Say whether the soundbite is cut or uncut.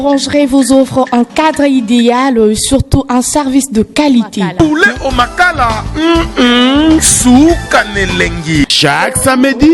uncut